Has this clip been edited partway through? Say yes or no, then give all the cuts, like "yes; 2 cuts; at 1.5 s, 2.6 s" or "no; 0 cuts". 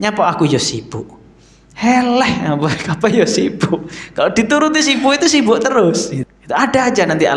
yes; 1 cut; at 6.1 s